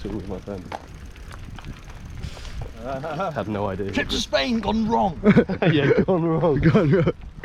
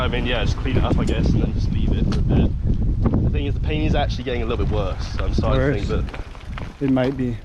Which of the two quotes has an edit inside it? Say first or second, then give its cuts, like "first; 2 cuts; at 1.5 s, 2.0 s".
first; 2 cuts; at 0.9 s, 2.7 s